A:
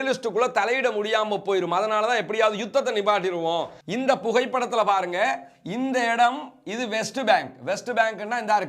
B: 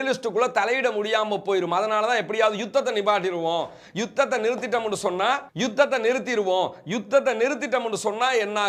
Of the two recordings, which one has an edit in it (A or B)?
A